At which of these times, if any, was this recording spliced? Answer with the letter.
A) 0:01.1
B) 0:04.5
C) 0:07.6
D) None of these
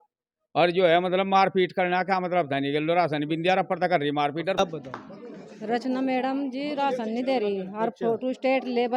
B